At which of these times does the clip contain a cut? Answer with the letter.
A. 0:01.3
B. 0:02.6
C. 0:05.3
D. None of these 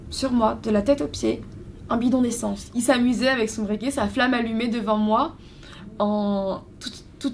B